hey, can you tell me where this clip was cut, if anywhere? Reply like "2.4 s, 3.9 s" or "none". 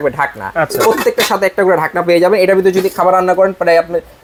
none